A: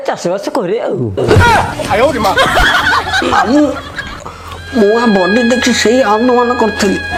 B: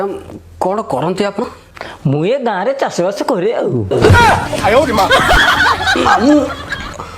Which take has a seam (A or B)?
B